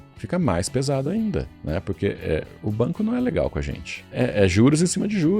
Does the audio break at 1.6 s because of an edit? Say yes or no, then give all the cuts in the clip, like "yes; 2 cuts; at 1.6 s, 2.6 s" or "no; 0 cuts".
yes; 3 cuts; at 1.6 s, 2.5 s, 4.1 s